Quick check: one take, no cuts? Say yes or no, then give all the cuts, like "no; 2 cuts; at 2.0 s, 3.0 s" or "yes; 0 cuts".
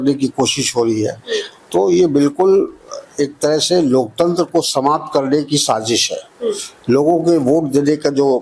yes; 0 cuts